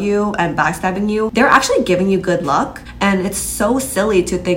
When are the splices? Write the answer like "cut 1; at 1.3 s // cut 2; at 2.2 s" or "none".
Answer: cut 1; at 1.3 s // cut 2; at 2.8 s